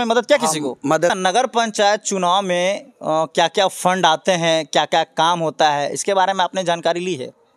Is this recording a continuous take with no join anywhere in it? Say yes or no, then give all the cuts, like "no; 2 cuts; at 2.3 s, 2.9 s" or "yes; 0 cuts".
no; 1 cut; at 1.2 s